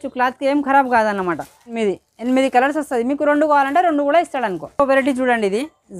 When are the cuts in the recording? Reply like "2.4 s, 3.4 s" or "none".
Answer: 1.8 s, 4.6 s